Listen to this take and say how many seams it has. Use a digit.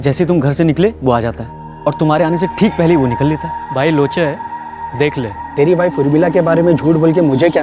2